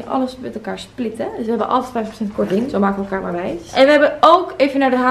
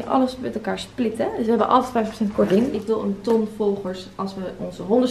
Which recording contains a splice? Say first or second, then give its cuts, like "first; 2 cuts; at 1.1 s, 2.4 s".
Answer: second; 1 cut; at 2.7 s